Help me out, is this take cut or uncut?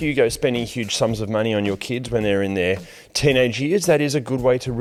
uncut